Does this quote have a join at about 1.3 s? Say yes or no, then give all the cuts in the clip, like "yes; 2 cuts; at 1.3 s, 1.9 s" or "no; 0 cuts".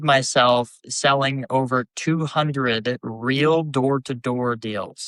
no; 0 cuts